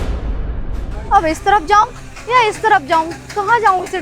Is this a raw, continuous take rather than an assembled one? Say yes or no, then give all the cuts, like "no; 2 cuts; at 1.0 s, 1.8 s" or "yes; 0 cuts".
no; 1 cut; at 0.9 s